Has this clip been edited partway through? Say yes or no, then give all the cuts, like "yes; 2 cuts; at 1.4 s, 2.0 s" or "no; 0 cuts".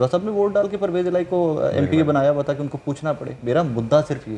no; 0 cuts